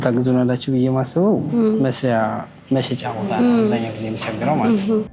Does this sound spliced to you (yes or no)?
no